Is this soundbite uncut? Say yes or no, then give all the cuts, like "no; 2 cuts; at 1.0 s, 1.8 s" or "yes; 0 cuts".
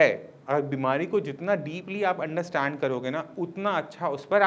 yes; 0 cuts